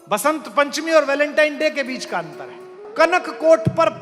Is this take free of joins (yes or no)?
no